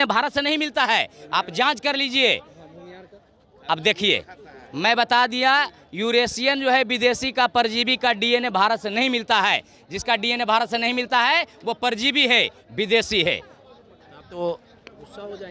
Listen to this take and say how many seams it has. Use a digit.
0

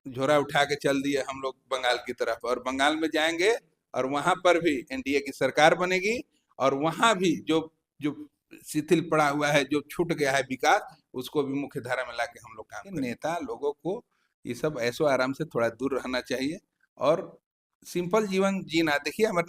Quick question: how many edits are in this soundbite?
1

